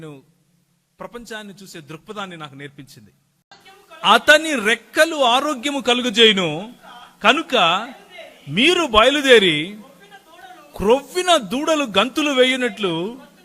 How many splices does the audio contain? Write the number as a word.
one